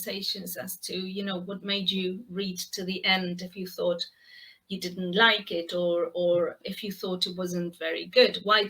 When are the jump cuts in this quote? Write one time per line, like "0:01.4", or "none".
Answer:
0:06.6